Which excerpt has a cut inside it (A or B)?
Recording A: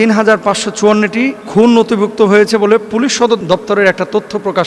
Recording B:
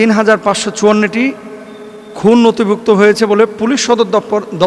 A